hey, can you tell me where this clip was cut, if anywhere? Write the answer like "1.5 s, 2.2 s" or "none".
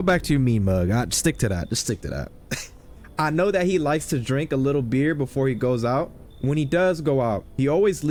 none

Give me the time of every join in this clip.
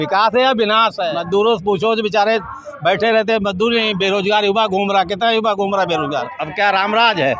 1.0 s, 6.4 s

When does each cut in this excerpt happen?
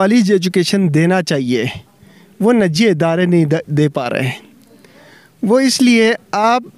none

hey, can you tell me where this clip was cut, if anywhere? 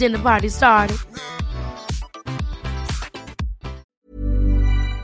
3.9 s

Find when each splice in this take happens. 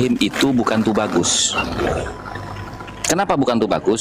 none

